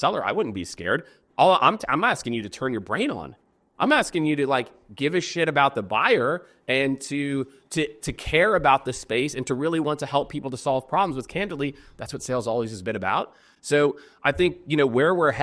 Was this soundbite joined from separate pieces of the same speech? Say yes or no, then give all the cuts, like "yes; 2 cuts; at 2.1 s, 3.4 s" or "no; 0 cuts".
no; 0 cuts